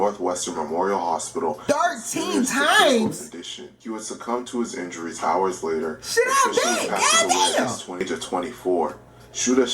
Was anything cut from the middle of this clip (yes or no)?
yes